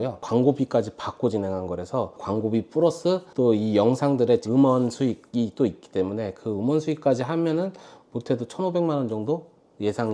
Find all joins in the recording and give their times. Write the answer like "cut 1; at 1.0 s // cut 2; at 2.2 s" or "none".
none